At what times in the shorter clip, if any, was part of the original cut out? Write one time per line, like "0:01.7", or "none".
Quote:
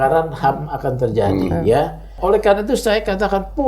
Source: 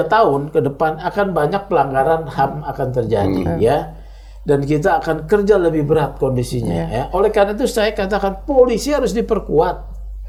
0:02.1